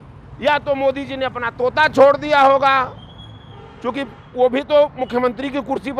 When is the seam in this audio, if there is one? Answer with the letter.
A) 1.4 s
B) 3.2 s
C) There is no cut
C